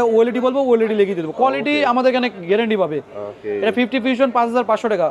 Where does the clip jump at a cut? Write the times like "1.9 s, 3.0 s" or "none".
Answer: none